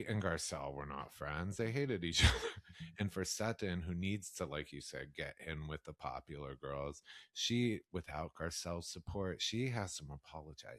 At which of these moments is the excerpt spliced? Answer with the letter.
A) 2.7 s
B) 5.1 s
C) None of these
A